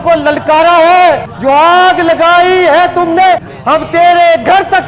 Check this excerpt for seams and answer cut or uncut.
cut